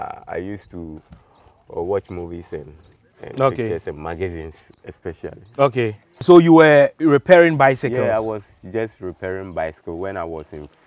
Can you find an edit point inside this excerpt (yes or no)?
yes